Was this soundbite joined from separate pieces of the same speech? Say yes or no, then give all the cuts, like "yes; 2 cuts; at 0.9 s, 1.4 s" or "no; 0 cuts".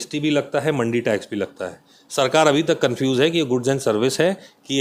no; 0 cuts